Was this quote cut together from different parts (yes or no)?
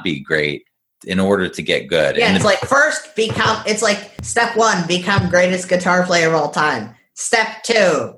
yes